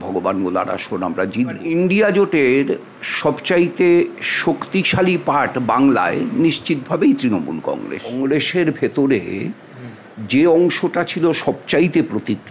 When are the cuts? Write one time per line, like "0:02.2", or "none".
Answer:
0:01.6
0:08.1